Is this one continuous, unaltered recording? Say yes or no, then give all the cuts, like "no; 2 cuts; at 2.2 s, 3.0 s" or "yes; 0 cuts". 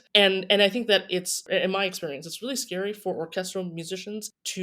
no; 1 cut; at 1.4 s